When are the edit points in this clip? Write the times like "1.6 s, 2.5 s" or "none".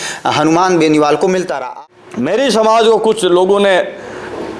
1.6 s